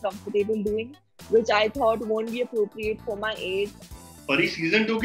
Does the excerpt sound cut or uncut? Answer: cut